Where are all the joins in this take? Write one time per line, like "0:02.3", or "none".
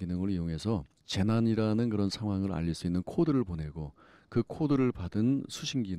none